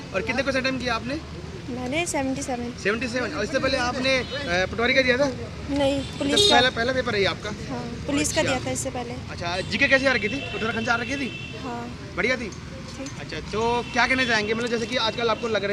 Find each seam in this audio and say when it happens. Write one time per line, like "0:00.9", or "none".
none